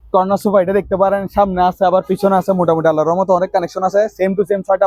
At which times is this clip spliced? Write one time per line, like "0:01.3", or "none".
none